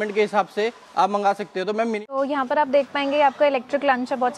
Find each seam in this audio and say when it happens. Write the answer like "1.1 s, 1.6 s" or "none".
2.0 s